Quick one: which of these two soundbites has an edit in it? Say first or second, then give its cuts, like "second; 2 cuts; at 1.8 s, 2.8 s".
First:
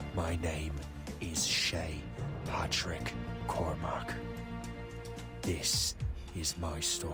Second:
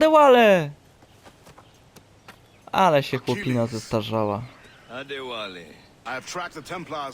second; 1 cut; at 5.9 s